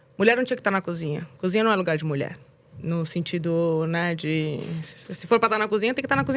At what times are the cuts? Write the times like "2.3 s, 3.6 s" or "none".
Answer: none